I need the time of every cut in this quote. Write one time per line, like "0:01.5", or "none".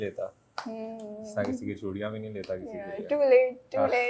none